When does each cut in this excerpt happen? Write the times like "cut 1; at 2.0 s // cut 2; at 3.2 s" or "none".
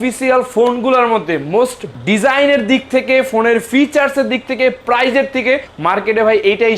cut 1; at 1.9 s // cut 2; at 5.7 s